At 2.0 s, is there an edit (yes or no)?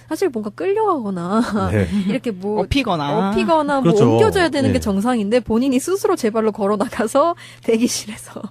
no